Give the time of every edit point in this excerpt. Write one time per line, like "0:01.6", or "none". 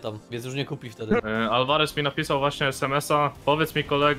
0:01.2

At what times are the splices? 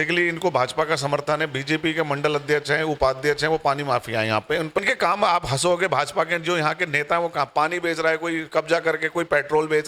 0:04.8

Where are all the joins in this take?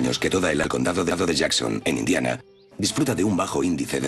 0:02.3

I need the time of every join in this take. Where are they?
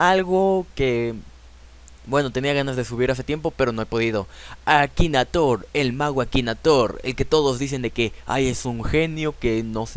0:08.6

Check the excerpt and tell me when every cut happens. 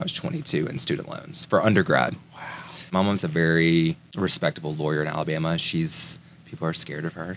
0:02.9
0:04.1

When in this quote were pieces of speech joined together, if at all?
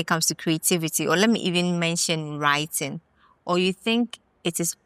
none

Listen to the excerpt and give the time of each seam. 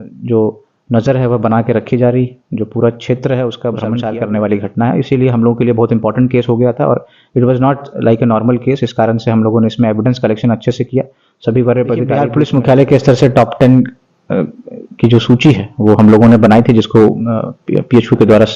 0:04.0
0:12.3

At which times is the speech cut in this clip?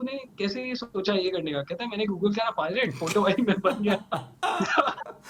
none

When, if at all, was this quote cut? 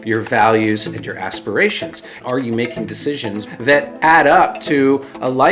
0:02.1
0:03.4

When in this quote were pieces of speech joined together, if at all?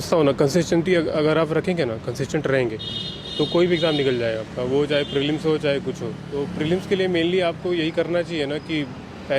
0:06.3

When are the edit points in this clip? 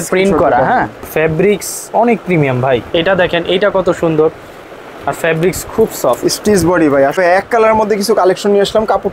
0:01.0
0:02.9
0:07.1

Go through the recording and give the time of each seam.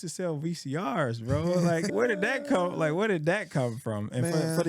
0:01.9

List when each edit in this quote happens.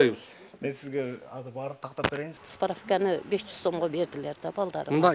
0:02.4

